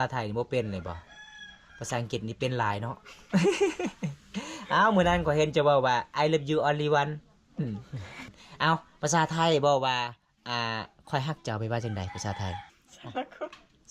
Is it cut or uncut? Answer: cut